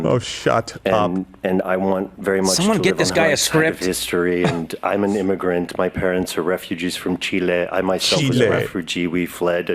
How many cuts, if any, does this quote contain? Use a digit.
0